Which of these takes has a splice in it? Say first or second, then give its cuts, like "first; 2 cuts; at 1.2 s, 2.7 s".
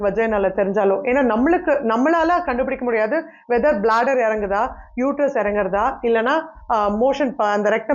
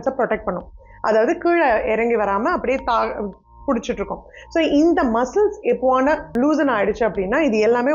second; 1 cut; at 6.3 s